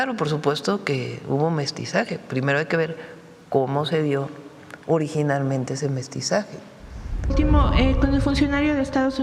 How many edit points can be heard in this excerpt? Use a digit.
1